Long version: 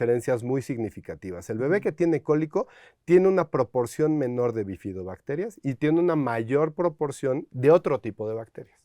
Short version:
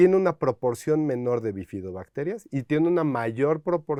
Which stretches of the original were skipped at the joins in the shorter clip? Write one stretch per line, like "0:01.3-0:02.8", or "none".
none